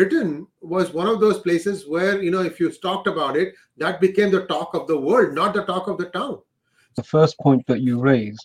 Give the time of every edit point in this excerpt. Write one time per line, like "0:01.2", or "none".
0:06.9